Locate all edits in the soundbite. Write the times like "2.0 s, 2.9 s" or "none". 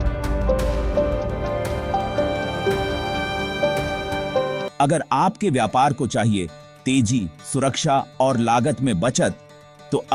4.7 s

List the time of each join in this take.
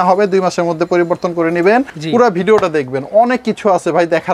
2.0 s

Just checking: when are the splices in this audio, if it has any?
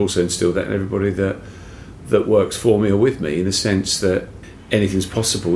4.3 s

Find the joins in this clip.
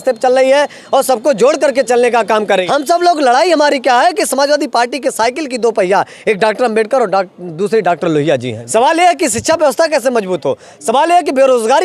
2.6 s, 8.6 s

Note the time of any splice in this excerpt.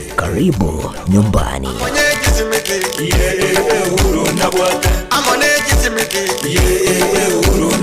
1.7 s

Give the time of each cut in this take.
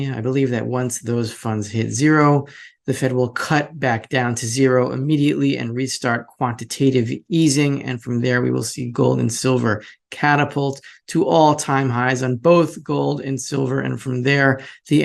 none

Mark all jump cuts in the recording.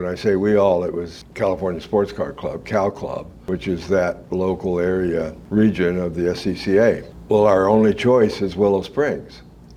none

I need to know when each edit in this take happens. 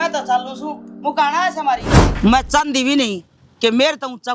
2.0 s

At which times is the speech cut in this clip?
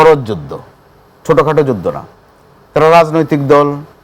none

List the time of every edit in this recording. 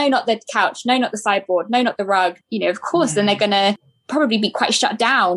2.4 s, 3.9 s

